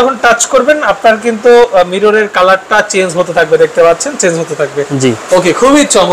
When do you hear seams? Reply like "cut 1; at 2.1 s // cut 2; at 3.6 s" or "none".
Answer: none